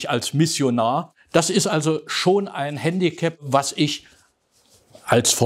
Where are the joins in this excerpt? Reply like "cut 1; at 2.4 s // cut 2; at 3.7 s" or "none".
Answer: cut 1; at 1.1 s // cut 2; at 3.4 s